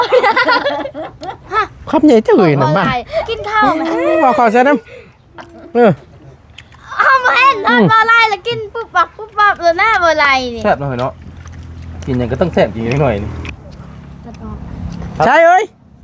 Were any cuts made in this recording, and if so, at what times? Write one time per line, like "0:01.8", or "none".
none